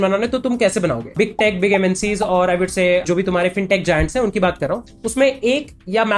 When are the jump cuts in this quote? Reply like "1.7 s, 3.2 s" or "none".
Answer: 1.1 s, 4.8 s